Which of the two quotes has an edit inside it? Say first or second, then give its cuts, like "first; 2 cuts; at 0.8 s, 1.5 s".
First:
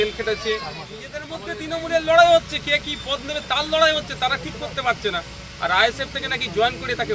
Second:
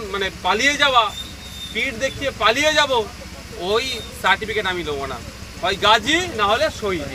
first; 1 cut; at 1.3 s